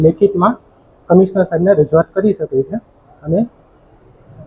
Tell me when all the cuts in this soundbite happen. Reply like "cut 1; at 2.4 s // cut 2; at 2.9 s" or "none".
none